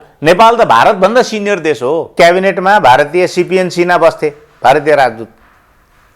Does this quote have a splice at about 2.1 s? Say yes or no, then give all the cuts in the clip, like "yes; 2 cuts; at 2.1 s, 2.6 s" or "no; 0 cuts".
yes; 1 cut; at 2.1 s